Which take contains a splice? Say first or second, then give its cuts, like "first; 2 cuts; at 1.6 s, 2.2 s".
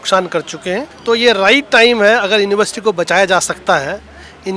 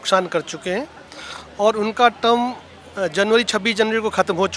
first; 1 cut; at 0.9 s